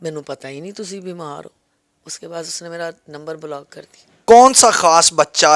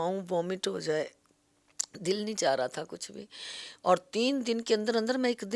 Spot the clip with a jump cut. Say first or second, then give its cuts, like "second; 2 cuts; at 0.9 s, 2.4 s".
first; 1 cut; at 4.1 s